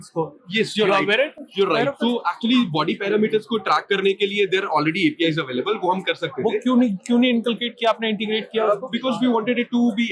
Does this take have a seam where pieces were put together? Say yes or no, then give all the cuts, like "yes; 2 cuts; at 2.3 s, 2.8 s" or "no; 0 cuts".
no; 0 cuts